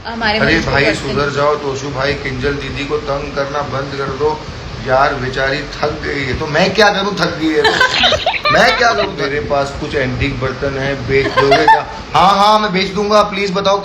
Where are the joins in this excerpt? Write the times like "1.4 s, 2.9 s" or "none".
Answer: 9.1 s